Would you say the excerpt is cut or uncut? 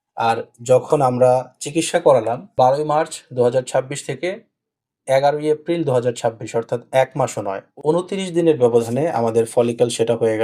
cut